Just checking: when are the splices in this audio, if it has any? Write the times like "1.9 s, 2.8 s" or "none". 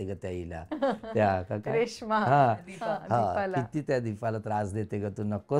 none